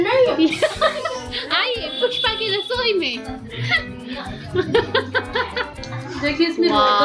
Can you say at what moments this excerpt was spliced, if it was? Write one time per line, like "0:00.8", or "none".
none